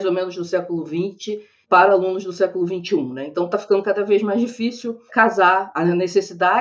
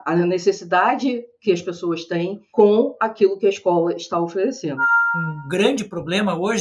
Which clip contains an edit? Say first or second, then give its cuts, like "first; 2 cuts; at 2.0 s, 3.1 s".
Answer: second; 2 cuts; at 2.4 s, 4.9 s